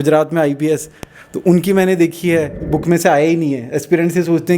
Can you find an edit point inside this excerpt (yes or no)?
yes